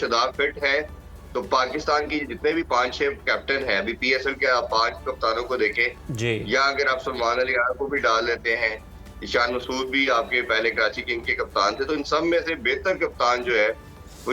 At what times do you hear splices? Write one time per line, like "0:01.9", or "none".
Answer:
none